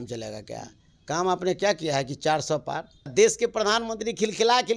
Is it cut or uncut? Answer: cut